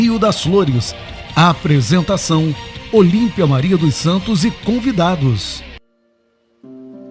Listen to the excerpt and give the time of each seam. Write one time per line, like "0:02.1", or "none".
0:06.1